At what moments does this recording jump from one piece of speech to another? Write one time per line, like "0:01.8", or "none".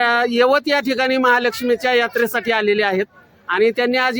none